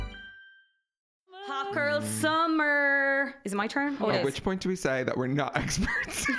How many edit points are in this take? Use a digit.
1